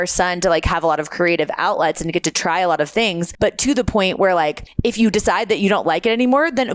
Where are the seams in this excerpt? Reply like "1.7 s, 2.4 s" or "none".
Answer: 3.3 s, 4.6 s